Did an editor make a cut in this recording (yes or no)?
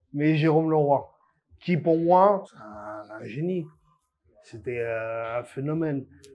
no